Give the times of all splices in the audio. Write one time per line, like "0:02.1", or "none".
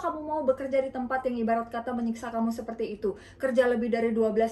none